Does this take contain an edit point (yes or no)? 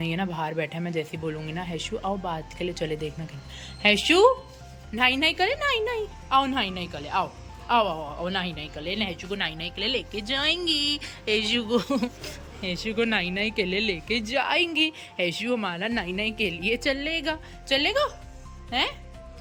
no